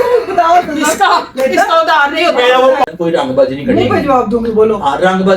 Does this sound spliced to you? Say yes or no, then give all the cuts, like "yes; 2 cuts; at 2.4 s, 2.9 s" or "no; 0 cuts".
yes; 1 cut; at 2.9 s